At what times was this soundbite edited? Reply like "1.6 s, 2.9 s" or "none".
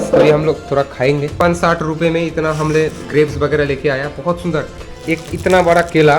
1.3 s, 4.9 s